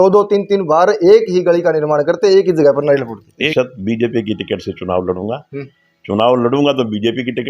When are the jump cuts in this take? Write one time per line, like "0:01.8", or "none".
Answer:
0:03.4